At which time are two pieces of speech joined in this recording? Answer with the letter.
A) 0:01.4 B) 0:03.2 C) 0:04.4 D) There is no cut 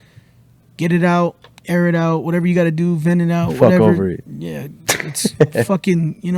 D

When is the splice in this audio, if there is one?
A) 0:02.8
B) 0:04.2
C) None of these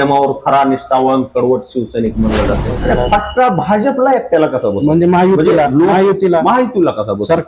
A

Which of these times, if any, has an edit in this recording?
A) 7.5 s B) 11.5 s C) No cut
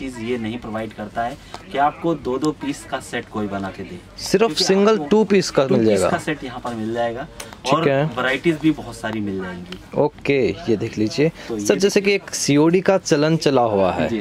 C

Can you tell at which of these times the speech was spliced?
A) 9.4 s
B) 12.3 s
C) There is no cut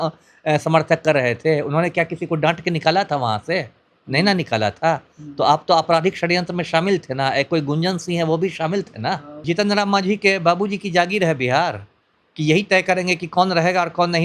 A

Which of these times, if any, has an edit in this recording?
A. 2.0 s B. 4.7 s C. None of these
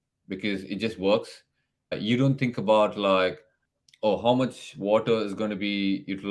A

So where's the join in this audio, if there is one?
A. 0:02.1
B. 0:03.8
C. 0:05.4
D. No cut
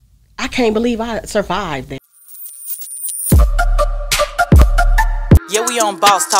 A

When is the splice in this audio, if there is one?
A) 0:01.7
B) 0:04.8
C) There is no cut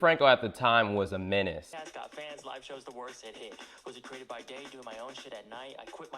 A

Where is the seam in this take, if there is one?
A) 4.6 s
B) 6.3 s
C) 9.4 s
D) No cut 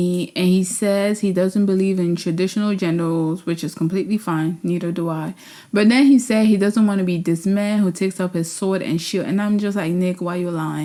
D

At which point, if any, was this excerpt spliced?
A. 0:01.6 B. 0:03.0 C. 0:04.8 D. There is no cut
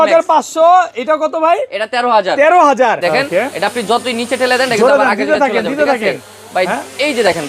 B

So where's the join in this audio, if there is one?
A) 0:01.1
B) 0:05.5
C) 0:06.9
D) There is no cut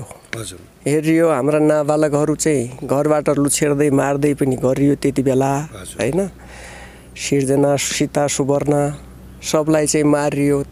D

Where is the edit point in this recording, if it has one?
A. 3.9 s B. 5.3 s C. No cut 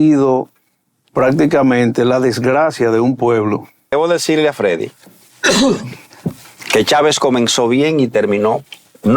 A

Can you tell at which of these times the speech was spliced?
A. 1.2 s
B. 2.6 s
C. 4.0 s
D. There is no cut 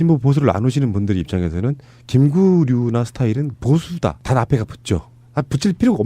C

